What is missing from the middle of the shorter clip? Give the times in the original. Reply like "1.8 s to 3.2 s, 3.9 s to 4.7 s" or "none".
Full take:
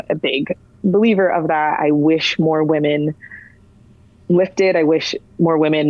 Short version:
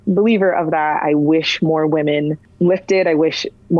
3.2 s to 4.1 s

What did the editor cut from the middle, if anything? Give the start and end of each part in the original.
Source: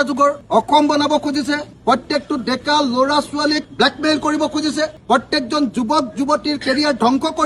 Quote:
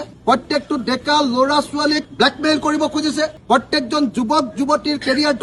none

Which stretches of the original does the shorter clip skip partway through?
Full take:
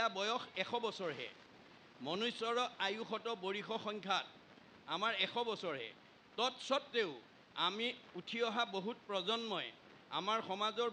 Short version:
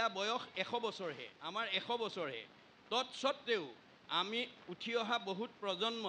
1.3 s to 4.8 s

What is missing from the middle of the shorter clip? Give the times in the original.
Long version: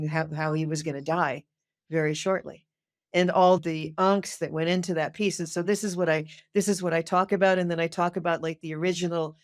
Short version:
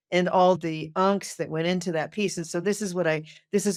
none

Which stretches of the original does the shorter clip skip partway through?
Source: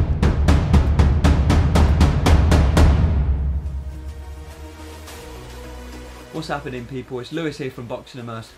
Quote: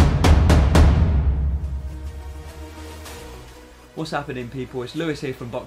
5.7 s to 6.0 s

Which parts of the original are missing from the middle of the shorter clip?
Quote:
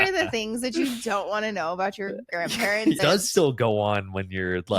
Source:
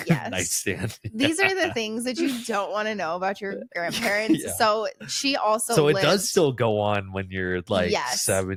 4.4 s to 6.0 s

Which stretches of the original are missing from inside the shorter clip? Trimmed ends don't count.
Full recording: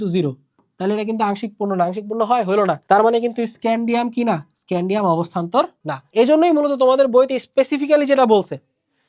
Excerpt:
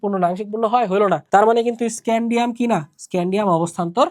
none

